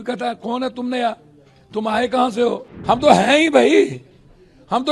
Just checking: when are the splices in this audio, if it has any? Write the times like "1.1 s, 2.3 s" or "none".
2.7 s